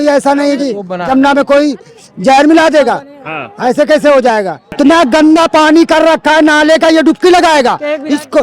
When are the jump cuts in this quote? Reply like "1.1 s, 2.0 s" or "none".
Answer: 4.6 s